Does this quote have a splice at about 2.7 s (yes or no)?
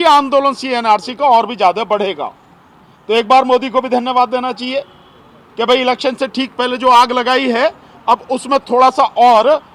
no